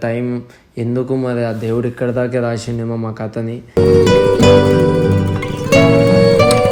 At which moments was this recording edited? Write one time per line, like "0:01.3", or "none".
none